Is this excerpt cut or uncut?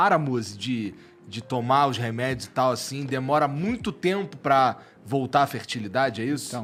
uncut